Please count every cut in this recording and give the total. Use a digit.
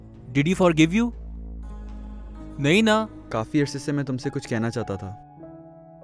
1